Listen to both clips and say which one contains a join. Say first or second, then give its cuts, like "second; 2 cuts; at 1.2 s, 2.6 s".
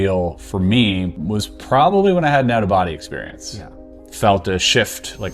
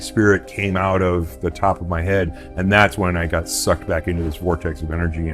first; 2 cuts; at 1.1 s, 3.7 s